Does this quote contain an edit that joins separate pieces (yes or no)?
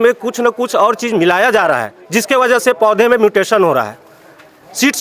no